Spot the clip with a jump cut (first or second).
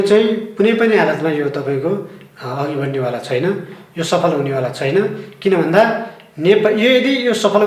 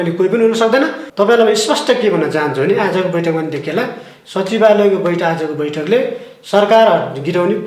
second